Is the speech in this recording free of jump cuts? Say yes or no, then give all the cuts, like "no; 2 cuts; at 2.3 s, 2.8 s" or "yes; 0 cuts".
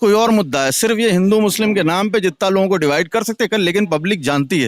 yes; 0 cuts